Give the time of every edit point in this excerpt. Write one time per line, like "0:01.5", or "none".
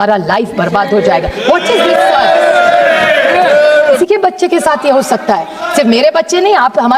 0:04.0